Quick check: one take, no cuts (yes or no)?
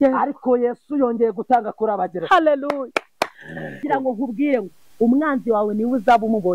no